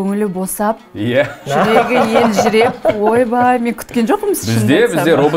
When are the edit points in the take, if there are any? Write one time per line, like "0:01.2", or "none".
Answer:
none

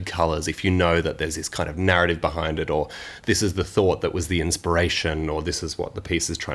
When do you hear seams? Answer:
none

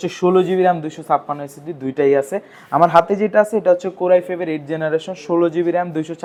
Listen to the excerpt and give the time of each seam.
none

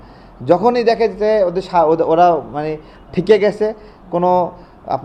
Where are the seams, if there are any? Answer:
none

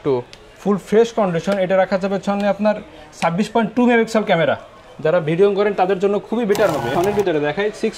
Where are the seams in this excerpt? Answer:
0:06.9

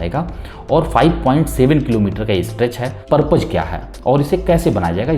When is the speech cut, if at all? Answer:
0:03.0

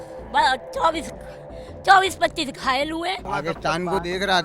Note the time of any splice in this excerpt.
0:03.3

